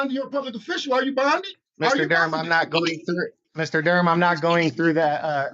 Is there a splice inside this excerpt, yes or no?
yes